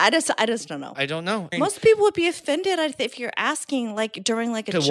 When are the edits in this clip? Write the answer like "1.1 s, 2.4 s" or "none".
1.5 s